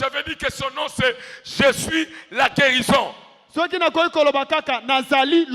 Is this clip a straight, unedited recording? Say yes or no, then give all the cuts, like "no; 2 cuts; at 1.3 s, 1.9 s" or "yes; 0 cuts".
yes; 0 cuts